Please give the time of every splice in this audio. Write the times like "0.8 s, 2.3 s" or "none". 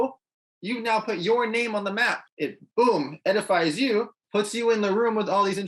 2.2 s, 4.2 s